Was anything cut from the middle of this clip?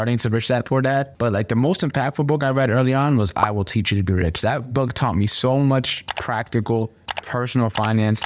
no; 0 cuts

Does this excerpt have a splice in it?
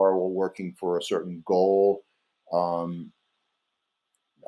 no; 0 cuts

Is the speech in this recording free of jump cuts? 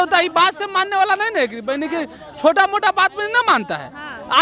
yes; 0 cuts

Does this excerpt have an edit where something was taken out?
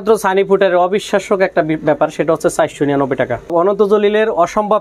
yes; 1 cut; at 3.5 s

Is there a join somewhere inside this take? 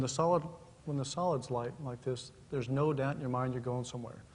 yes; 1 cut; at 1.5 s

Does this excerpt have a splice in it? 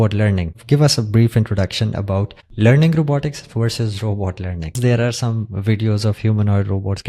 yes; 2 cuts; at 2.4 s, 4.8 s

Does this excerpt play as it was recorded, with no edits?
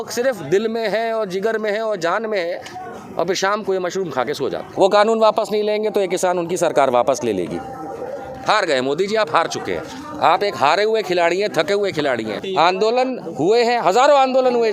no; 2 cuts; at 4.7 s, 12.4 s

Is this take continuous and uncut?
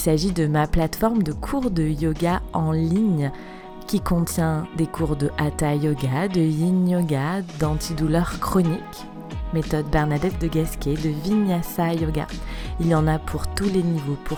yes; 0 cuts

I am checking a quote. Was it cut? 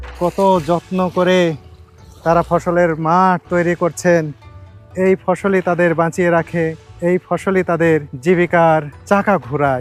yes; 3 cuts; at 6.8 s, 8.1 s, 8.9 s

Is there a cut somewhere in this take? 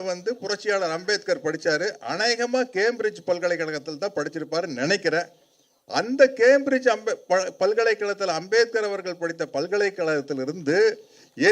no; 0 cuts

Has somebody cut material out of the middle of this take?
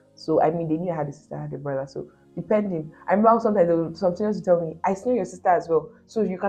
no; 0 cuts

